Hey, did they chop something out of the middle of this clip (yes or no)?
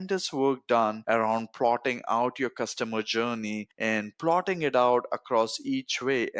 no